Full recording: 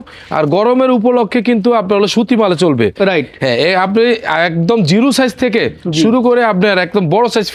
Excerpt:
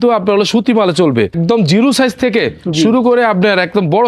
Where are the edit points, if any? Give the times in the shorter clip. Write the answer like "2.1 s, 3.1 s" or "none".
1.3 s